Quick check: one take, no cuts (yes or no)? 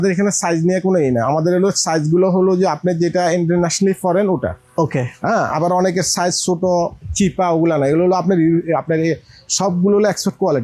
yes